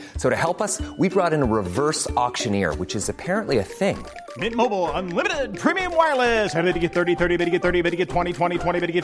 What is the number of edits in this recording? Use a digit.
0